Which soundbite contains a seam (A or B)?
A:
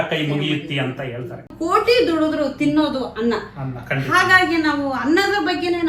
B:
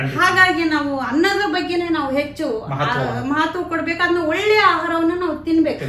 A